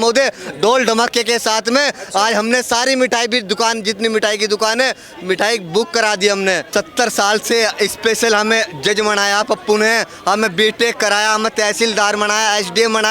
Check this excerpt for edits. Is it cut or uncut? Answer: cut